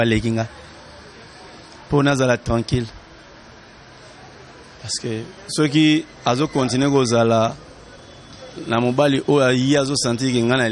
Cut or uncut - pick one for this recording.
uncut